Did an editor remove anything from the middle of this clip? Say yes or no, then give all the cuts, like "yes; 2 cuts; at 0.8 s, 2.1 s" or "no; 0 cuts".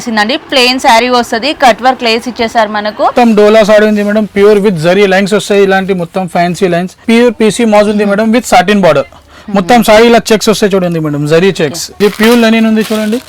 yes; 3 cuts; at 3.1 s, 7.0 s, 11.8 s